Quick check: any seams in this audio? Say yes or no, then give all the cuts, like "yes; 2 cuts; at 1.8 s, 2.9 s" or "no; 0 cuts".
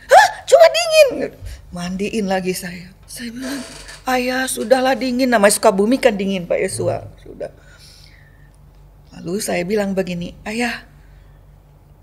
yes; 1 cut; at 3.0 s